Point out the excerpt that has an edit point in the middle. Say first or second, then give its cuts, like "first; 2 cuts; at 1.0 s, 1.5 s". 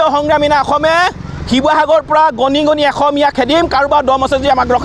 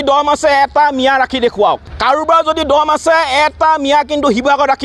second; 1 cut; at 1.9 s